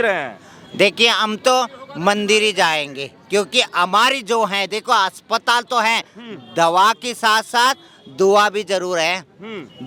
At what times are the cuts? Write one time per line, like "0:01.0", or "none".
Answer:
none